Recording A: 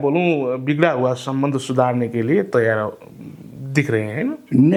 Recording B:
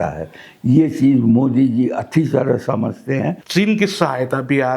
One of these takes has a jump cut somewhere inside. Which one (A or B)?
B